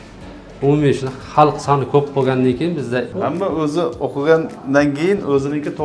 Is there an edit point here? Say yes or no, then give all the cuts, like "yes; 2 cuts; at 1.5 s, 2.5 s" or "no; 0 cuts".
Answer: yes; 1 cut; at 3.1 s